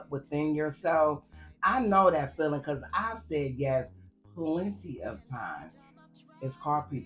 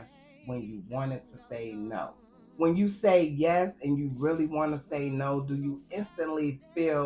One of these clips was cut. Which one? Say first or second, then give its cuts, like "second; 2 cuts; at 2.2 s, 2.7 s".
second; 1 cut; at 2.4 s